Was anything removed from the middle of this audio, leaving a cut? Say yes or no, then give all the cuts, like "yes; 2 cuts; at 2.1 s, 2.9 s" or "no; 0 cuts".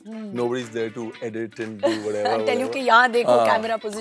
no; 0 cuts